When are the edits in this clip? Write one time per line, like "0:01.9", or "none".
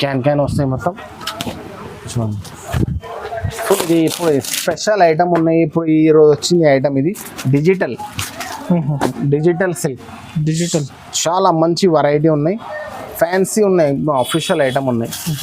0:03.8